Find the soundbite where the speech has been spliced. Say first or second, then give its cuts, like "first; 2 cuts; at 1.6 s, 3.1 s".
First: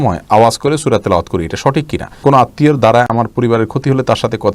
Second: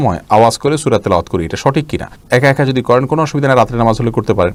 first; 1 cut; at 2.2 s